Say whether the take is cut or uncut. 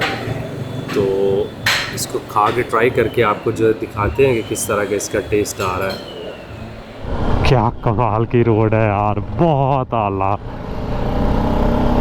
cut